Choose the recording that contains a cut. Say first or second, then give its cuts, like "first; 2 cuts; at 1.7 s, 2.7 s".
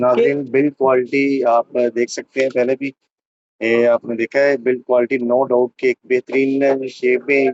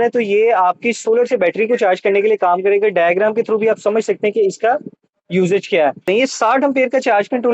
second; 1 cut; at 6.0 s